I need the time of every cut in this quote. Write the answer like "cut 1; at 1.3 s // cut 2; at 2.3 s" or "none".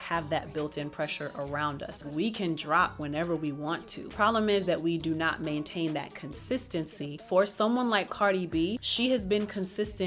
cut 1; at 2.1 s // cut 2; at 4.0 s // cut 3; at 7.2 s // cut 4; at 8.9 s